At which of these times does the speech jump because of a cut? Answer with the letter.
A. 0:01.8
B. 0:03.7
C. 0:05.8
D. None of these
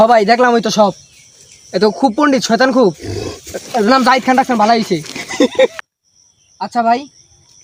D